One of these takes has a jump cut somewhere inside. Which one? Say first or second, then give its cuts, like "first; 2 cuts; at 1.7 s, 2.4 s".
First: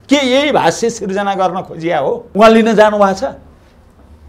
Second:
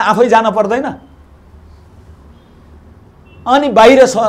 first; 1 cut; at 2.2 s